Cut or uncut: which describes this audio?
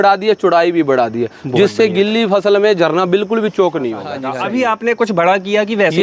cut